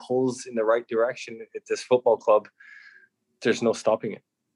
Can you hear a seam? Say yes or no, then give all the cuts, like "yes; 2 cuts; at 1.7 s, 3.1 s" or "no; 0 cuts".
no; 0 cuts